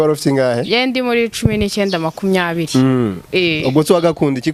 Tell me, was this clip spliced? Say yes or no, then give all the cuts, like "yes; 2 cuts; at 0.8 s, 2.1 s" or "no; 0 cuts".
no; 0 cuts